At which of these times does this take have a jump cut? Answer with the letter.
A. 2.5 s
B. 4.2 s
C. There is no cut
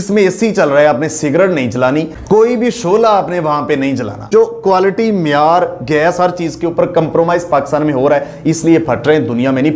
B